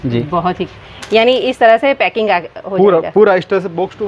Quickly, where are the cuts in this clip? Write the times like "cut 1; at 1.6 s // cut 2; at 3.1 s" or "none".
none